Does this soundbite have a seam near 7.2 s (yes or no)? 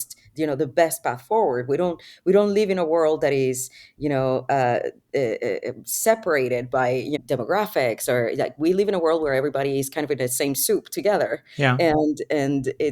yes